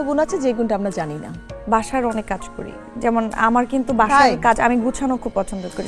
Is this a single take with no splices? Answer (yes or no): yes